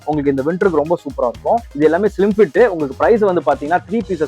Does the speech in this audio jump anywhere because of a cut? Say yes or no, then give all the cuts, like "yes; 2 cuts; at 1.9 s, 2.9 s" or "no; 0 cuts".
yes; 1 cut; at 1.7 s